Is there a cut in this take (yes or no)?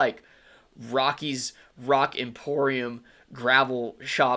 no